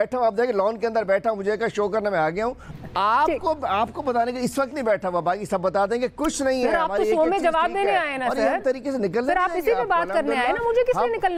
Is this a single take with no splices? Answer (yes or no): yes